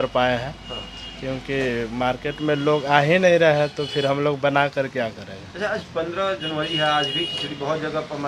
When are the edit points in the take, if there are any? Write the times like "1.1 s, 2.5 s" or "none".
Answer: none

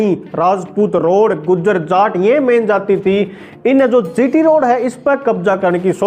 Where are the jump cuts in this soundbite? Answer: none

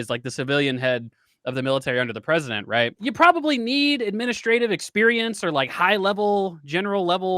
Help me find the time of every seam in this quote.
3.0 s

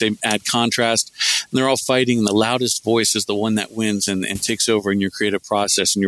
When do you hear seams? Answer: none

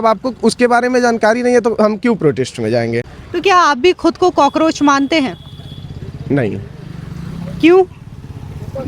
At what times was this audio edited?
none

